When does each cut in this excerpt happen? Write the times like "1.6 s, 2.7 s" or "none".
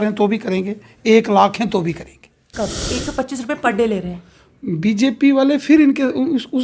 2.8 s